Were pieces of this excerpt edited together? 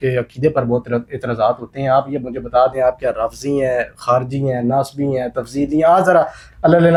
no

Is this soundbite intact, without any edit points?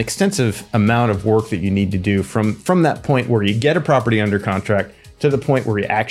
yes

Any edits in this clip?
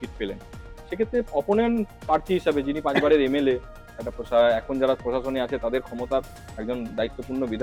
no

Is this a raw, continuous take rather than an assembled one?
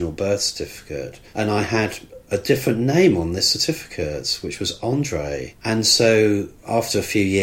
no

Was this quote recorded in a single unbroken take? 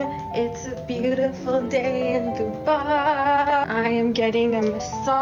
yes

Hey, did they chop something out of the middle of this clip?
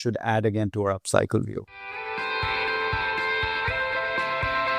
yes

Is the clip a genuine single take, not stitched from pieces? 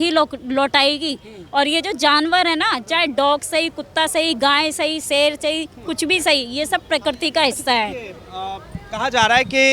yes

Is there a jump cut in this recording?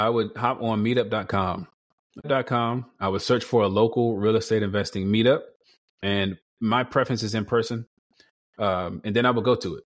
yes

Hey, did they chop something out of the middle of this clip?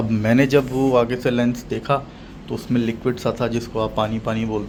no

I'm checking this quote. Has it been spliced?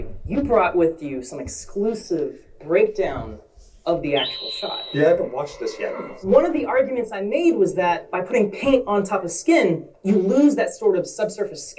yes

